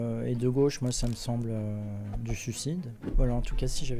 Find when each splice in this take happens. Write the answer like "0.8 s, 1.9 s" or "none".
3.0 s